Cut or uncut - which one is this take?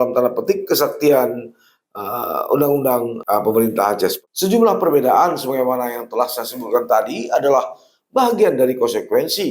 cut